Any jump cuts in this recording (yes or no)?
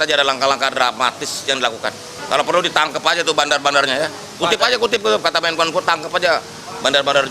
yes